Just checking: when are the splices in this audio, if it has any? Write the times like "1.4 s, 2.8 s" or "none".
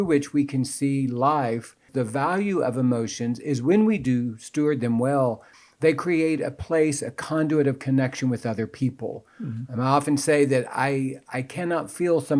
1.9 s